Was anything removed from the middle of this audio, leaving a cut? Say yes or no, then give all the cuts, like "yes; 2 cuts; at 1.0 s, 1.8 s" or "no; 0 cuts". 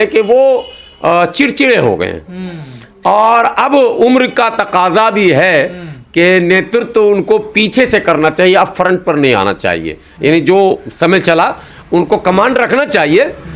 no; 0 cuts